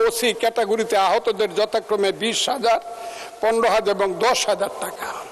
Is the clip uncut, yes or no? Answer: yes